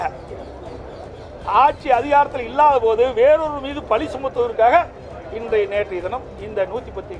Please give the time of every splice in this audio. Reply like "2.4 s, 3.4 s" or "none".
none